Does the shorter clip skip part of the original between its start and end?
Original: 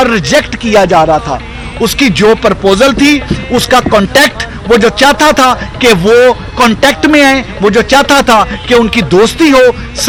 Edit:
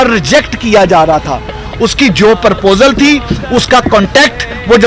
no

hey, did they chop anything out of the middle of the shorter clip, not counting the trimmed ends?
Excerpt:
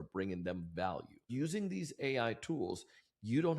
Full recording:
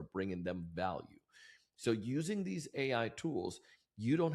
yes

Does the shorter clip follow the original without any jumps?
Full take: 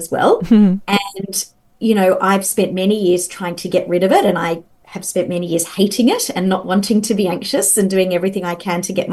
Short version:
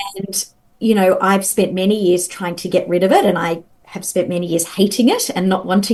yes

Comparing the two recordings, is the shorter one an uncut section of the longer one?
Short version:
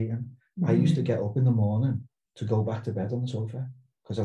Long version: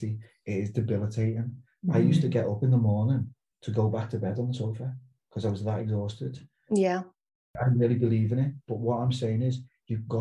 yes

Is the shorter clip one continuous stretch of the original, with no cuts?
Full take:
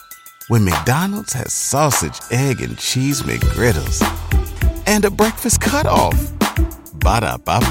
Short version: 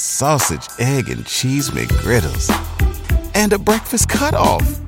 yes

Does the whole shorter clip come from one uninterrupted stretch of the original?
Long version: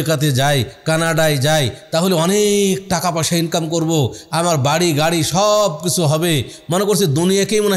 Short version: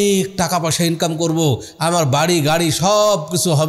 yes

